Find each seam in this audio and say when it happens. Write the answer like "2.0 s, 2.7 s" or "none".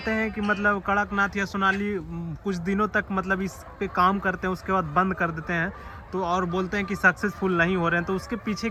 none